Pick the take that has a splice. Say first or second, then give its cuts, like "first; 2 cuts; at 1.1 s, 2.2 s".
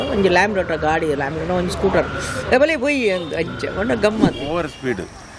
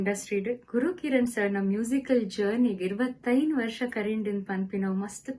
first; 1 cut; at 4.5 s